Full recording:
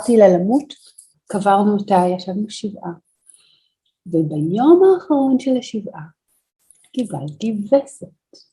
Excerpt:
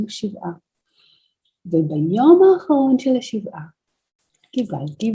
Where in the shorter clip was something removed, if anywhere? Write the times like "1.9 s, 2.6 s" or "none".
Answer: none